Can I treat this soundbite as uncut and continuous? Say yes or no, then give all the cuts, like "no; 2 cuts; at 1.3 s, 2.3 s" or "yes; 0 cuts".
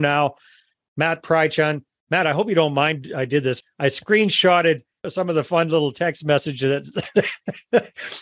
no; 2 cuts; at 3.6 s, 5.1 s